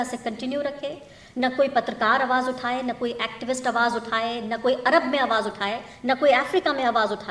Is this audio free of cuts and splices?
yes; 0 cuts

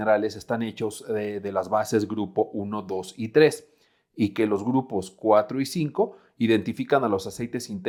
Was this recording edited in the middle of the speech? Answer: no; 0 cuts

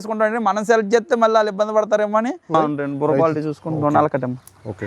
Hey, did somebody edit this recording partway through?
yes; 1 cut; at 2.6 s

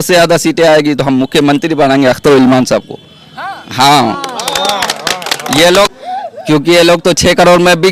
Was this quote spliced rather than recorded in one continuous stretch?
yes; 1 cut; at 5.9 s

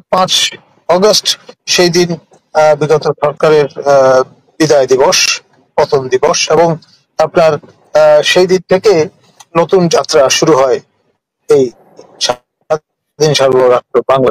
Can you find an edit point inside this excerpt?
no; 0 cuts

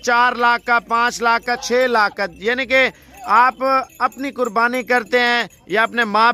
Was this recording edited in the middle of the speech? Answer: no; 0 cuts

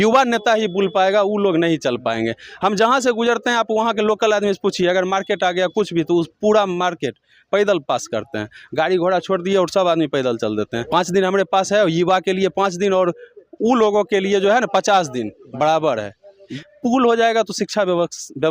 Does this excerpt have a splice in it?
yes; 2 cuts; at 10.8 s, 16.4 s

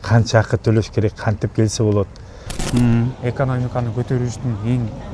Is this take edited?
yes; 1 cut; at 2.6 s

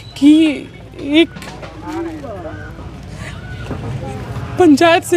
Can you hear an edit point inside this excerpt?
no; 0 cuts

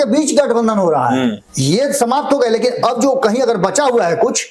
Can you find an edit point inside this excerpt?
yes; 1 cut; at 1.5 s

